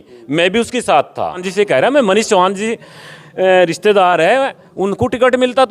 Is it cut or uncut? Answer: cut